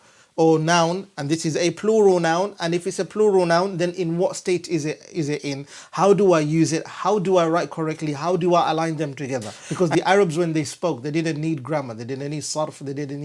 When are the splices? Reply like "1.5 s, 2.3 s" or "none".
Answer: 9.6 s